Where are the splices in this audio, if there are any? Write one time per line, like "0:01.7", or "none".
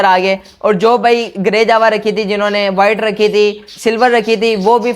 none